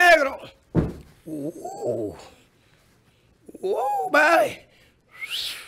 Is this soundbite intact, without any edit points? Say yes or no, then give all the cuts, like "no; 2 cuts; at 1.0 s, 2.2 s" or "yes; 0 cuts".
yes; 0 cuts